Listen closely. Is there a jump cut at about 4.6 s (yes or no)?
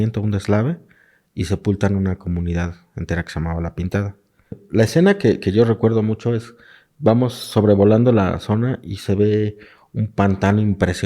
yes